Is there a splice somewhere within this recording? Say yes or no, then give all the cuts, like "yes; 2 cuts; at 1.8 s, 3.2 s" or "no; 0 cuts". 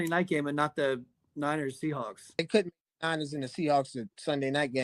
yes; 1 cut; at 2.4 s